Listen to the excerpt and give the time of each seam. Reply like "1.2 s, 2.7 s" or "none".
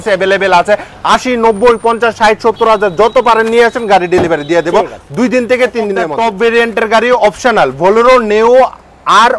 6.0 s